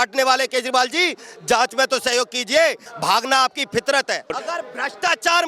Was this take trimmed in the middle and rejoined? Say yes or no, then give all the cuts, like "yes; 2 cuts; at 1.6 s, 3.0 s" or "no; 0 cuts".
yes; 2 cuts; at 2.9 s, 4.4 s